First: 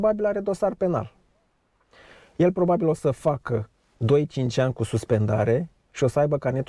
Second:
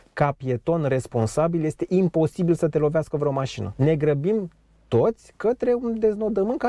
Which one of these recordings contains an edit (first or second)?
second